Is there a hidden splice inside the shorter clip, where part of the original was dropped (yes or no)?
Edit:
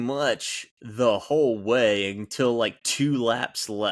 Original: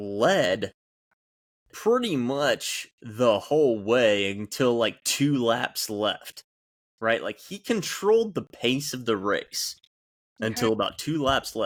no